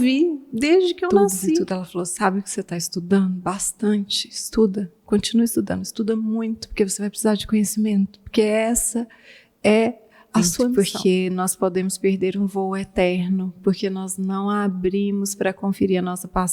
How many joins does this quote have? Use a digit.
2